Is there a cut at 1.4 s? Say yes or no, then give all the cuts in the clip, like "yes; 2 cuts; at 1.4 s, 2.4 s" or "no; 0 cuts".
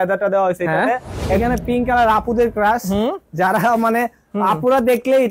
yes; 1 cut; at 1.4 s